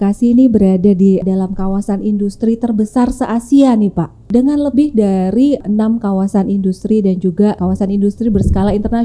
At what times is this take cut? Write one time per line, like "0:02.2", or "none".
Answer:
0:01.2
0:04.3
0:05.6
0:07.6